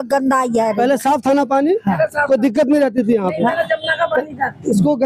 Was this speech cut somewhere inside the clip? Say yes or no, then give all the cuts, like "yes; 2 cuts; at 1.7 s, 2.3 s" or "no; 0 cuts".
no; 0 cuts